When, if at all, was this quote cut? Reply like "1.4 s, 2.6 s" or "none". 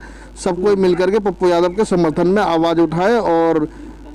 none